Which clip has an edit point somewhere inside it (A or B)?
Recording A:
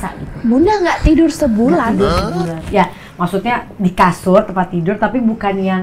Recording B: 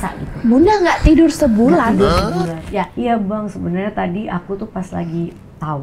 B